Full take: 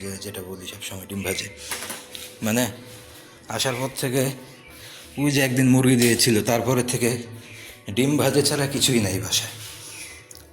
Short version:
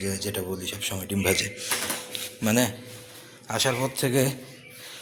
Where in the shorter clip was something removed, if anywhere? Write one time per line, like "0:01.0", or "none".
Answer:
none